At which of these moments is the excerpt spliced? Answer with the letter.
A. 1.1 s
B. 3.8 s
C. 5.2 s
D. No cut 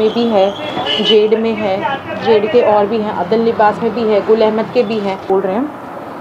C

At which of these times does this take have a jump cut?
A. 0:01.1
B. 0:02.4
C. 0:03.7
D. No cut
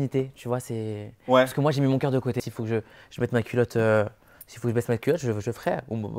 B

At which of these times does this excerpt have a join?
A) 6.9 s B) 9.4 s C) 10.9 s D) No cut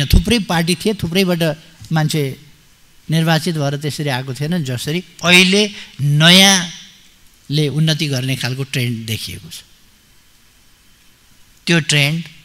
D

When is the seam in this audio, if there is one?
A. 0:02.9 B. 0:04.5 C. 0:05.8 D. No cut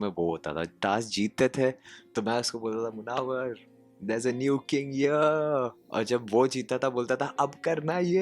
C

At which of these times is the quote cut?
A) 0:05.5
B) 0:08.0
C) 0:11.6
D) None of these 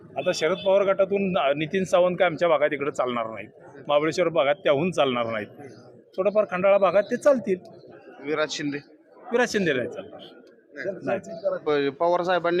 C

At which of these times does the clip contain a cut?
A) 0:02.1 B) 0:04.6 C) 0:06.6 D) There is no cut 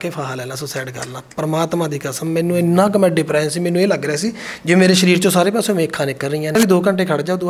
C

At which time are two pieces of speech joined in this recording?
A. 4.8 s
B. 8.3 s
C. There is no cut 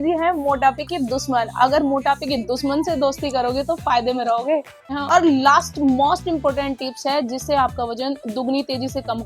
A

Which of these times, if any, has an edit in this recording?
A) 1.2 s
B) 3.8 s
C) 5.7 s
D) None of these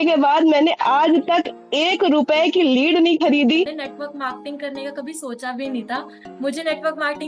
B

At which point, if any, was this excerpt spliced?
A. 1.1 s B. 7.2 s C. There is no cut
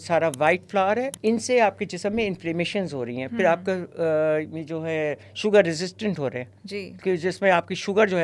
A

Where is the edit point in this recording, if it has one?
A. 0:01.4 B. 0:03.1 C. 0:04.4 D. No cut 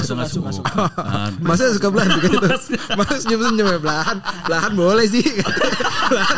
D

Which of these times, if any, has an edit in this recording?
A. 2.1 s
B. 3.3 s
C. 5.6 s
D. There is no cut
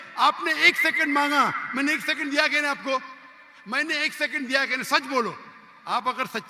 D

